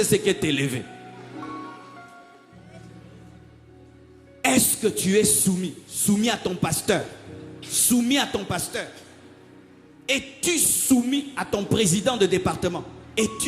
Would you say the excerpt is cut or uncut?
uncut